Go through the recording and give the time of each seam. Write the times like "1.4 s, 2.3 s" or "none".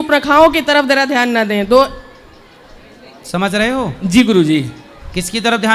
none